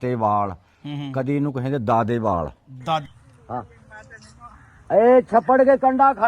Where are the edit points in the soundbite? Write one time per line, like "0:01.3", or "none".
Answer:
0:03.1